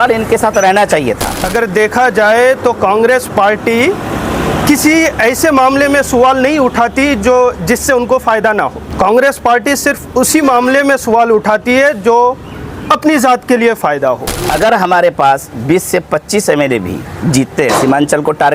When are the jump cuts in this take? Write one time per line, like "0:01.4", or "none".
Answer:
0:01.3
0:08.8
0:14.4